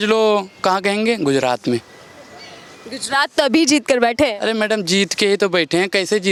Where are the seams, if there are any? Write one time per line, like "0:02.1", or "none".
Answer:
none